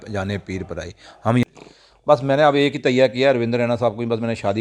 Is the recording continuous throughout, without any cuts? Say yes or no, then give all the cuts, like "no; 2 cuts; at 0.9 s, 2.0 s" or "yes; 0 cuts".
no; 1 cut; at 1.4 s